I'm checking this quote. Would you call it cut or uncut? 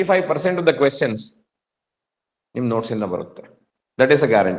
uncut